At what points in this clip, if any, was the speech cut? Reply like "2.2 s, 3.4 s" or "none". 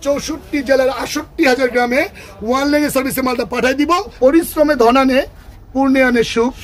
4.1 s

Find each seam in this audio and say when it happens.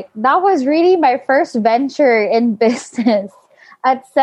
none

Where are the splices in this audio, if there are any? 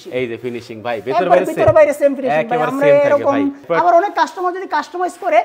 3.6 s

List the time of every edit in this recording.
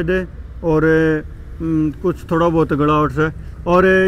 none

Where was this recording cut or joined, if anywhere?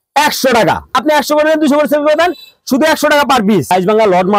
1.0 s, 3.7 s

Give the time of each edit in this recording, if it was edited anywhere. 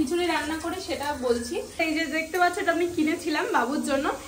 1.8 s

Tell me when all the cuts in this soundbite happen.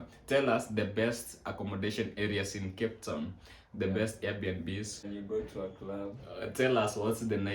5.0 s

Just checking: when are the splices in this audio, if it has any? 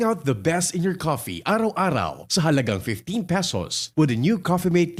none

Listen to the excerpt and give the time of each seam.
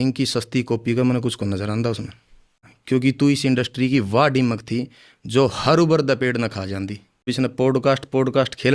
2.6 s, 7.3 s

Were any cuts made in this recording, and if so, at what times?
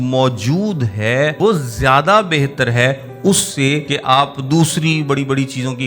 1.3 s, 3.9 s

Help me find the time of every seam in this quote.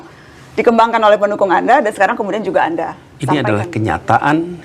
3.1 s

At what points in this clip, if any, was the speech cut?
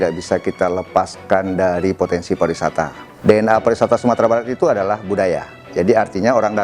3.0 s

